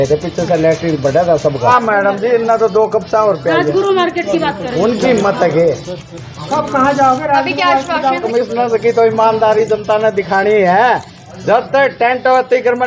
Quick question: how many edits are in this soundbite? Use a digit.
2